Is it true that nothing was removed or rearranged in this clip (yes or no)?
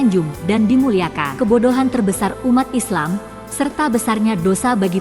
no